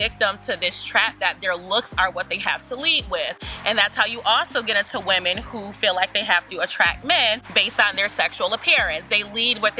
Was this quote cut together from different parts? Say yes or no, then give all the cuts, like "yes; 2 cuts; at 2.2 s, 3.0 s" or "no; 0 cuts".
no; 0 cuts